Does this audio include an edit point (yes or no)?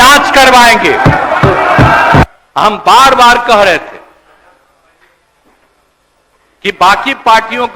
yes